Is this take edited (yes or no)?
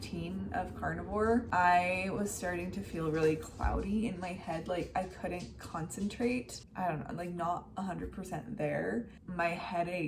yes